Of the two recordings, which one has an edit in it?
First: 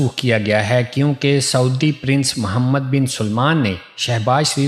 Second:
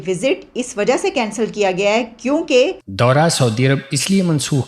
second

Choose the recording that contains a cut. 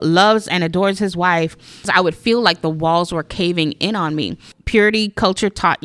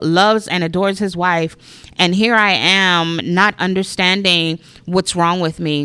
first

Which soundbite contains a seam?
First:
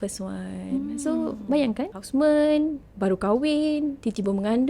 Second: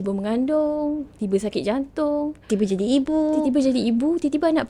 first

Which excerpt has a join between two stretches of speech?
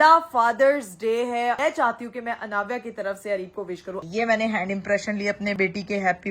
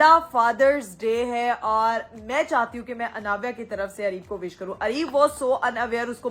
first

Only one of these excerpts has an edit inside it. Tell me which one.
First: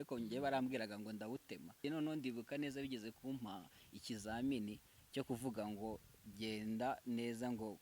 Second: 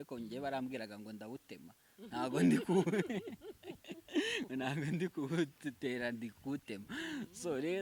first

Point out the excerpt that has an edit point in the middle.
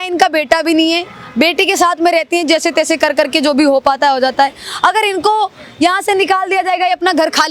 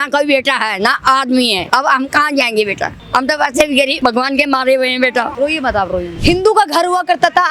second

